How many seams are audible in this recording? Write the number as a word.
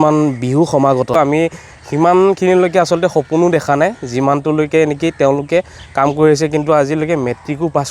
one